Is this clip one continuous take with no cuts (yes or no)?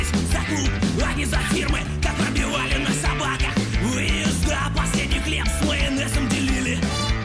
yes